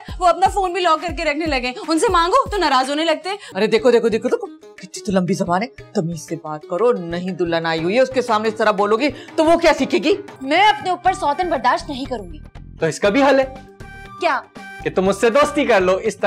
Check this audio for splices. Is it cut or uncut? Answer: cut